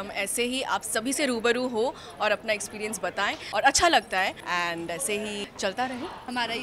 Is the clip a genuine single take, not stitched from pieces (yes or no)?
yes